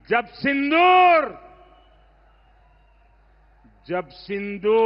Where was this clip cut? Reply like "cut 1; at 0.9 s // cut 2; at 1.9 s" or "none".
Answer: none